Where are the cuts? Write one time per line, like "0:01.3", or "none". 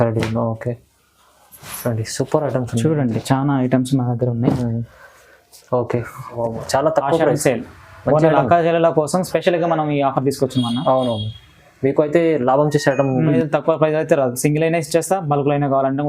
0:06.4
0:13.4